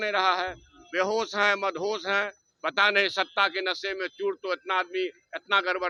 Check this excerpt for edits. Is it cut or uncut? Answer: uncut